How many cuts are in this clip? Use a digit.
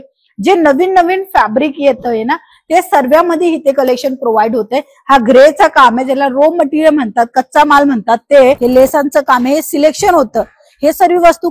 1